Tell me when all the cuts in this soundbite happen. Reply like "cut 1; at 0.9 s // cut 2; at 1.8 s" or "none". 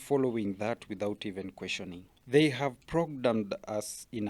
cut 1; at 2.0 s